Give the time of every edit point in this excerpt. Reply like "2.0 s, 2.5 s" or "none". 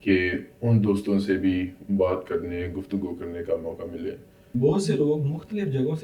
4.4 s